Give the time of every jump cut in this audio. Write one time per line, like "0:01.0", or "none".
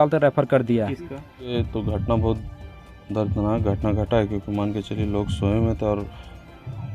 0:01.5